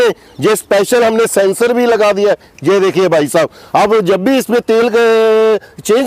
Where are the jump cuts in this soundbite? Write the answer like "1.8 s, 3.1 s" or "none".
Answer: none